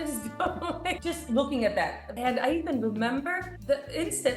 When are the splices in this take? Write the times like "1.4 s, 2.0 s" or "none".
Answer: 1.0 s, 2.0 s

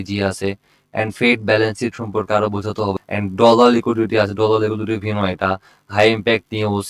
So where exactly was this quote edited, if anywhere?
3.0 s

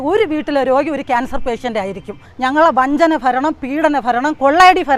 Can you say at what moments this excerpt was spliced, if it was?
2.3 s

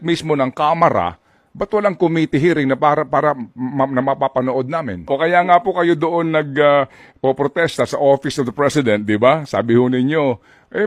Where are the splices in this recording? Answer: 5.0 s

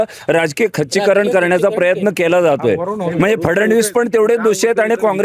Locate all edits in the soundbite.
3.0 s

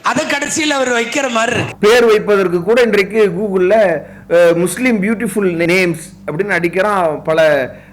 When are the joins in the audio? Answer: 5.7 s

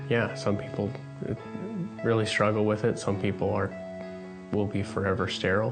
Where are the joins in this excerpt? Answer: none

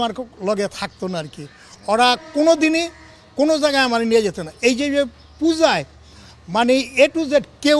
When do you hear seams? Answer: none

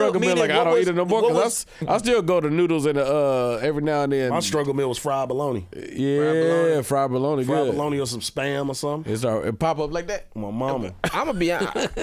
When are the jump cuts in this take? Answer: none

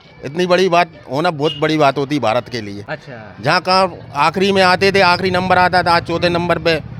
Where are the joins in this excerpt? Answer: none

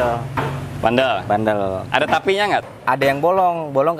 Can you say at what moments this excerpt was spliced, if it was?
2.6 s

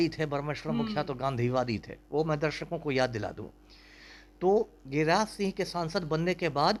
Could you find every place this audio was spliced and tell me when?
none

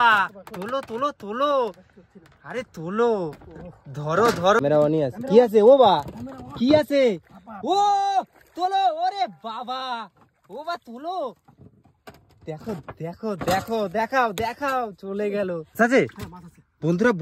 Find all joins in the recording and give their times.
4.6 s, 15.7 s

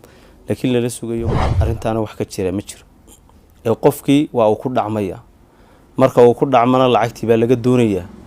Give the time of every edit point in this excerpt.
1.5 s

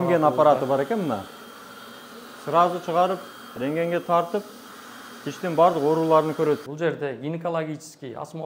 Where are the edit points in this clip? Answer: 6.6 s

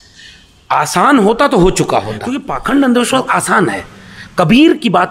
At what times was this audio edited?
2.5 s

